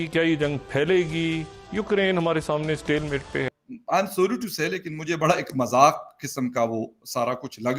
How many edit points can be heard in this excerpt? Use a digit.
1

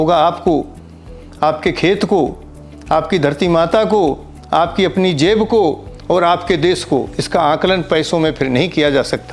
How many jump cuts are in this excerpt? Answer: 0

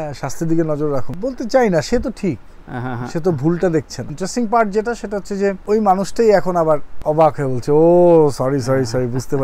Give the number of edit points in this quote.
4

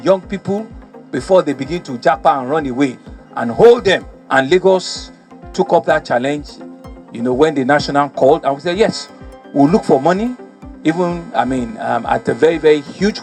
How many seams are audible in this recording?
1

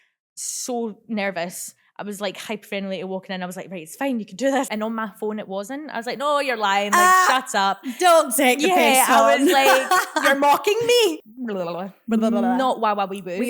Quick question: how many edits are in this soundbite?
2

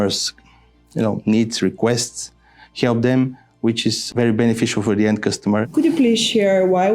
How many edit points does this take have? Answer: 2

